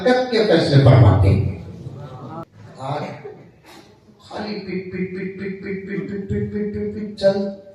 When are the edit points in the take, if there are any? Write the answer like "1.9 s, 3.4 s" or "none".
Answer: 2.5 s